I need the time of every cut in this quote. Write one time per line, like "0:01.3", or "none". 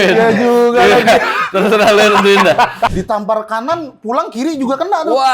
0:02.9

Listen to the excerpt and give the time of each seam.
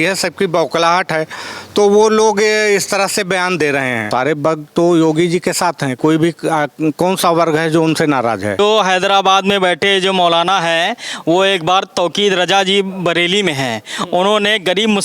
0:04.0
0:08.6

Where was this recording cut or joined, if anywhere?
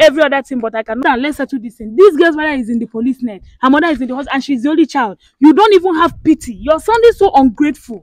0:01.0

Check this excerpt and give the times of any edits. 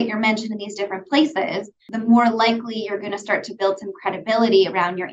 0:01.9

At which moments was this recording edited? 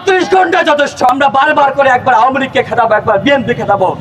0:01.1

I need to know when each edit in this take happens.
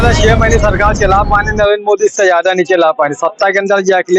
none

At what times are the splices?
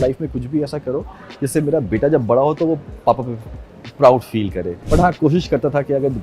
0:04.7

